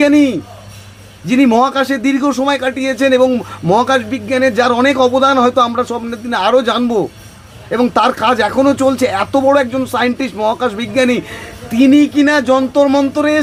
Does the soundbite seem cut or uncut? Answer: uncut